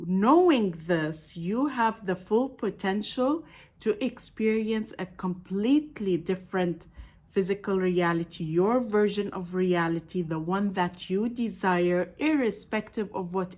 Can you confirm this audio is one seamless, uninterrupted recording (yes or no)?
yes